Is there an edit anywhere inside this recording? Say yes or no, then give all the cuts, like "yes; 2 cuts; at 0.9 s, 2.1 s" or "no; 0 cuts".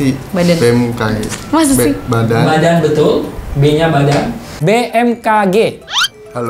no; 0 cuts